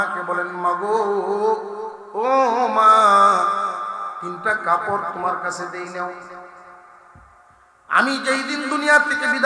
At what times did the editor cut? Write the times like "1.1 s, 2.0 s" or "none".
none